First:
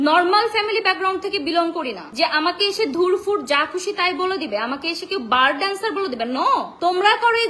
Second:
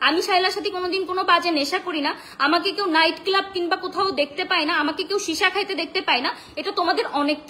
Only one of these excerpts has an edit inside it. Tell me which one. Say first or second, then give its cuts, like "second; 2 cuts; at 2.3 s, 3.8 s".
first; 2 cuts; at 2.0 s, 6.7 s